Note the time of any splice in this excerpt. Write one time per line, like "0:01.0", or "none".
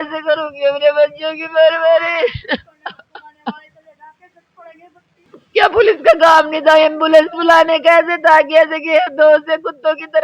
0:05.3